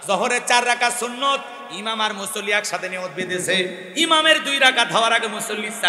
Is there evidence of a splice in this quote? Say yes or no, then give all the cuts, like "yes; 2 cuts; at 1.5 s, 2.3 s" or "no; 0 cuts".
no; 0 cuts